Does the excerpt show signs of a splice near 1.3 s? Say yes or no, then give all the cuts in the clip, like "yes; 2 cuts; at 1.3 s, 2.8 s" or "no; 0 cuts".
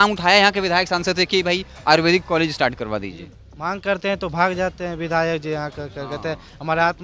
no; 0 cuts